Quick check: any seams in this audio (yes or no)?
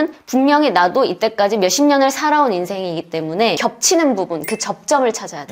yes